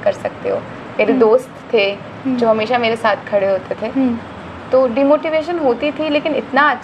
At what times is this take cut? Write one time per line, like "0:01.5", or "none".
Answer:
none